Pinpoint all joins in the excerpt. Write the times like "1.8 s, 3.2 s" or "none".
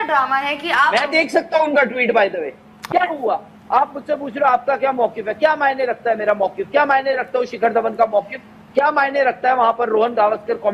2.8 s